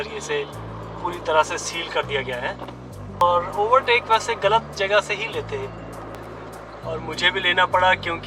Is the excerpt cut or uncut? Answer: cut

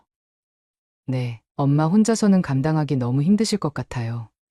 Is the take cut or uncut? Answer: uncut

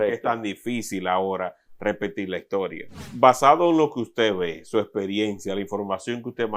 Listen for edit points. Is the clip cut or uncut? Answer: cut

